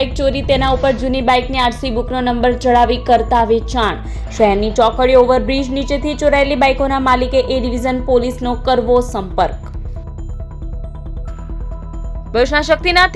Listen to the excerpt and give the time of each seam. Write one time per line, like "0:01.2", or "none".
none

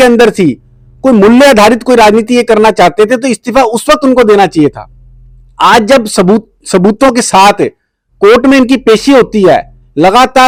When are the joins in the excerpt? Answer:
none

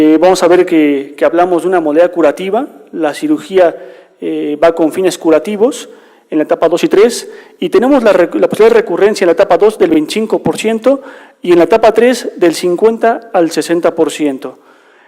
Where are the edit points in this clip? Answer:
0:01.7

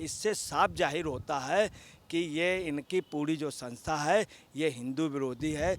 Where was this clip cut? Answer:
none

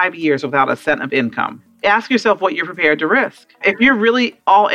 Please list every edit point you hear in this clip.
0:01.6
0:03.6

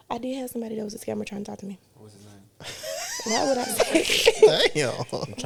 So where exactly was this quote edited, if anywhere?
none

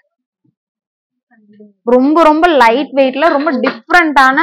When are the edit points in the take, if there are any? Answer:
none

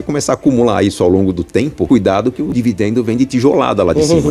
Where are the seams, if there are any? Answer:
0:01.9

